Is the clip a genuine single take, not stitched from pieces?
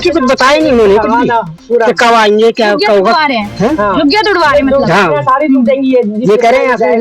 yes; 0 cuts

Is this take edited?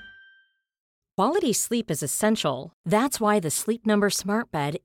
yes; 1 cut; at 1.0 s

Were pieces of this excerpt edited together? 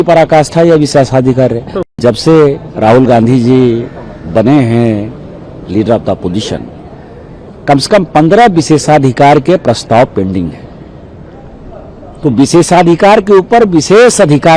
yes; 1 cut; at 1.8 s

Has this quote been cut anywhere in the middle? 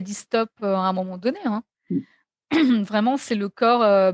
no; 0 cuts

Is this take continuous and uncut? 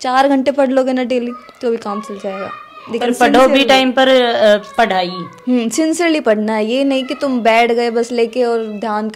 yes; 0 cuts

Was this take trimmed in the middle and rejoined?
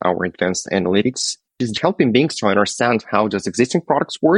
yes; 1 cut; at 1.5 s

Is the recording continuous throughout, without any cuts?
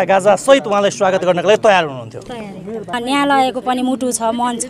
no; 1 cut; at 2.9 s

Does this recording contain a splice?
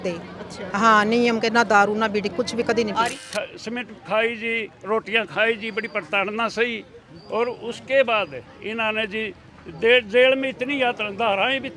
yes; 1 cut; at 3.2 s

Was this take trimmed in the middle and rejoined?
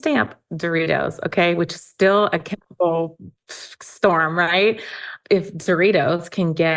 yes; 1 cut; at 5.1 s

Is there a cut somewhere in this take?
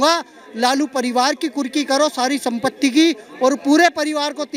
no; 0 cuts

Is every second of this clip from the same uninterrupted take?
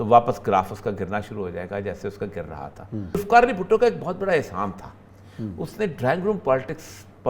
no; 1 cut; at 3.2 s

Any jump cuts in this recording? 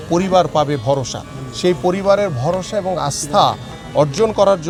no; 0 cuts

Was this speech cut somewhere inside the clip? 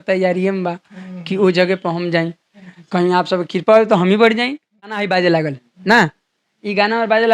yes; 1 cut; at 5.0 s

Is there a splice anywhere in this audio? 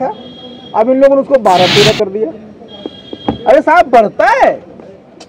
no; 0 cuts

